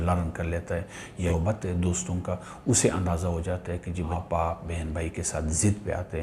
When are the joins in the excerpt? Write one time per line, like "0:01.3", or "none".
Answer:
0:01.3
0:04.1